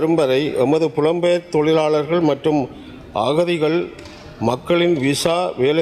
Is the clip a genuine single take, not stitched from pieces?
yes; 0 cuts

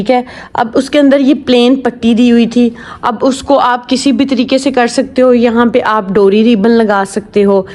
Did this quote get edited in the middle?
no; 0 cuts

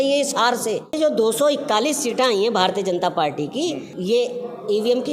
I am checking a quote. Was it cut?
yes; 2 cuts; at 0.9 s, 3.9 s

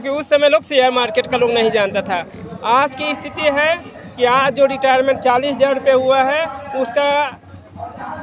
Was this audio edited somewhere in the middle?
no; 0 cuts

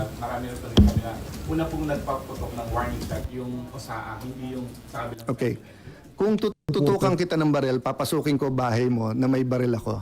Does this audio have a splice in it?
yes; 1 cut; at 6.9 s

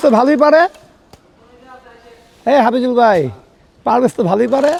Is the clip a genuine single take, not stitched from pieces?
yes; 0 cuts

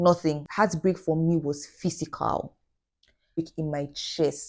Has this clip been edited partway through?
yes; 1 cut; at 3.4 s

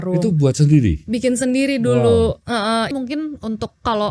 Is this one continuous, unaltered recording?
no; 1 cut; at 2.9 s

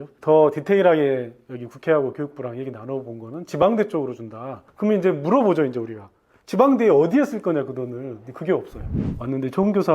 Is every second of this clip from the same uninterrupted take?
no; 1 cut; at 9.0 s

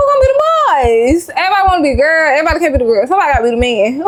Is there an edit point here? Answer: no; 0 cuts

